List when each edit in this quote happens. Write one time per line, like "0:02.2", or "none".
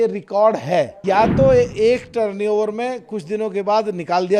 0:01.0